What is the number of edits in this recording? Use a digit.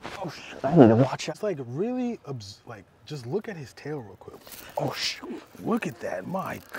1